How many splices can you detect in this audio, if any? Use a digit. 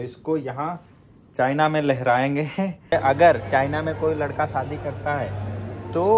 1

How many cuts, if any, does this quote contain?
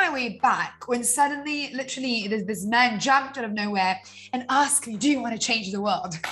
0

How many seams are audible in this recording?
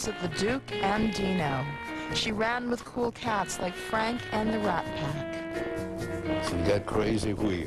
0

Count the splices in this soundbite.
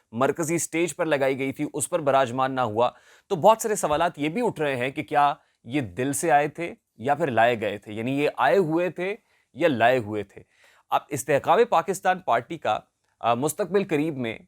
0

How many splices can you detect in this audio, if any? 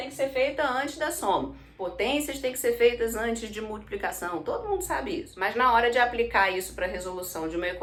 0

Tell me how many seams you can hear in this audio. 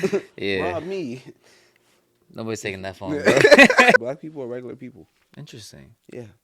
1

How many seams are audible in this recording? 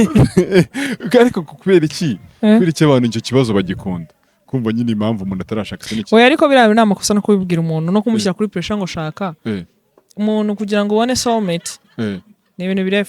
0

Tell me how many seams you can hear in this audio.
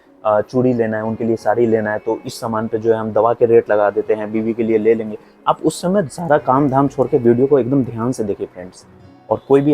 1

